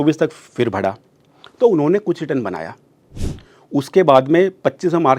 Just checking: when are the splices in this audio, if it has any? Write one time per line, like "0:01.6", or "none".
none